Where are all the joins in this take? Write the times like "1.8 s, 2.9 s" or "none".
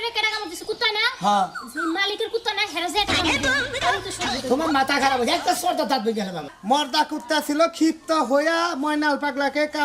6.5 s